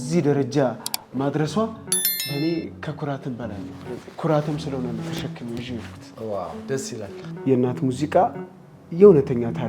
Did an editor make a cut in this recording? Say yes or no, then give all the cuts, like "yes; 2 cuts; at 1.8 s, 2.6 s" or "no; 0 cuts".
yes; 1 cut; at 7.2 s